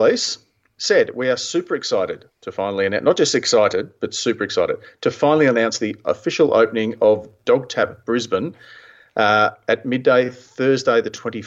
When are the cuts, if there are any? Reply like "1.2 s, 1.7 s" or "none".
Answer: none